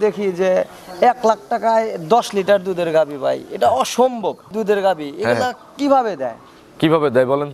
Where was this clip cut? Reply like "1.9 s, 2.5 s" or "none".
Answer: 4.4 s

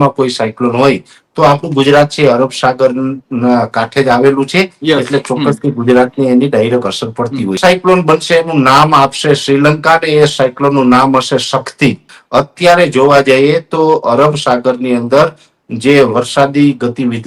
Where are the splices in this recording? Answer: 7.6 s, 12.1 s

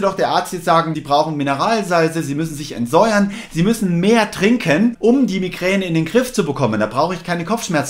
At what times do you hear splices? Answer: 1.0 s, 5.0 s

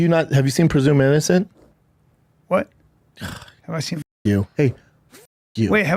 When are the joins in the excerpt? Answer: none

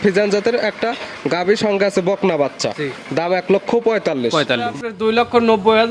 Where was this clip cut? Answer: 4.7 s

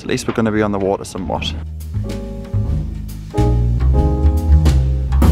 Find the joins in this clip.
none

